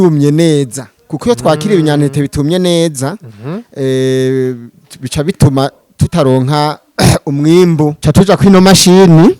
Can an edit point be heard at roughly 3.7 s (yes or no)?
no